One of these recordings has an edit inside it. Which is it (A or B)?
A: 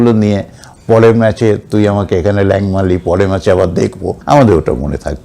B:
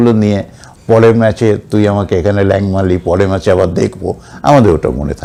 A